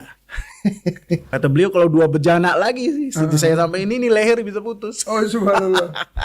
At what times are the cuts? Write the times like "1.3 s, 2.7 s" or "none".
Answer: 1.3 s

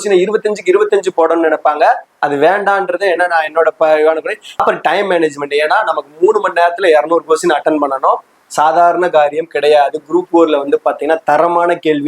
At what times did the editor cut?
4.6 s

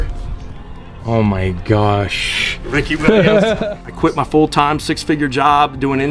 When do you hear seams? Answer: 3.6 s

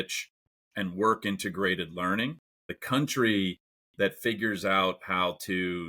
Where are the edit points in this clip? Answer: 2.8 s

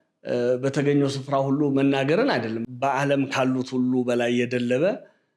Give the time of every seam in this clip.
2.7 s

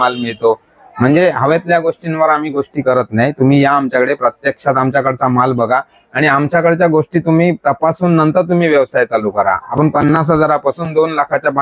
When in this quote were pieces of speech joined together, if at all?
9.6 s

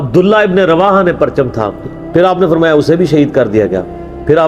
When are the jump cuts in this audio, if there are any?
none

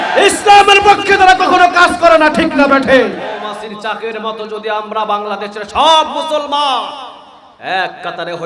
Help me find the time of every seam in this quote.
3.3 s

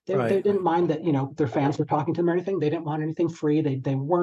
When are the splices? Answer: none

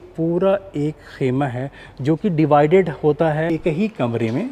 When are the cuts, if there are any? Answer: 3.5 s

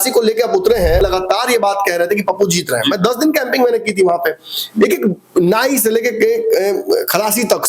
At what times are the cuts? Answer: 1.0 s

